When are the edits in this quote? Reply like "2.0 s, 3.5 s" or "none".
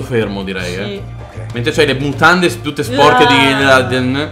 none